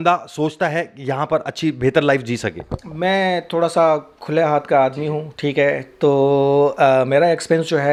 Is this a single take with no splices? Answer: yes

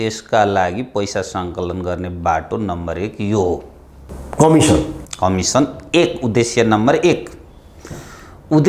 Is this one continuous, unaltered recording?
yes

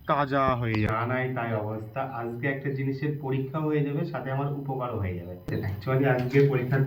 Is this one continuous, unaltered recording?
no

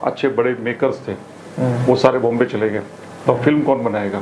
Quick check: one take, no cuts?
yes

